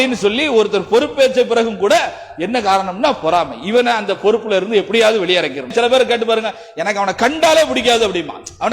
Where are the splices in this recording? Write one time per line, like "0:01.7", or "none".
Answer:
0:05.7